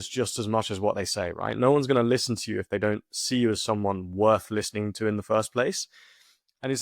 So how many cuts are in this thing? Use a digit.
0